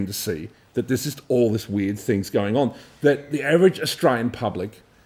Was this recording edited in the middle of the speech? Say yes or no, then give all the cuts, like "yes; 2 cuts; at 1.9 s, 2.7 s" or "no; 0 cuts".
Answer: no; 0 cuts